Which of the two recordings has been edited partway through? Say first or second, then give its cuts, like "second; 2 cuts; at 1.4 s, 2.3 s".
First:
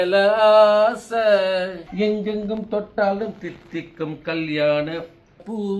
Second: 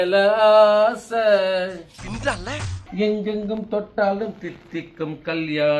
first; 1 cut; at 1.8 s